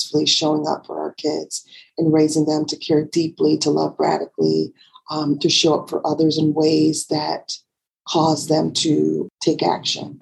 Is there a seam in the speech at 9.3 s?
yes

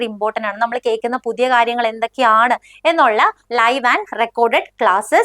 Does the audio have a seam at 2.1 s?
no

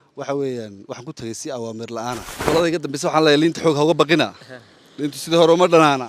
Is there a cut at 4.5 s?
no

